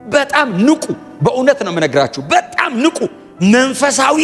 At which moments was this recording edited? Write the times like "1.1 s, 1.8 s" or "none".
none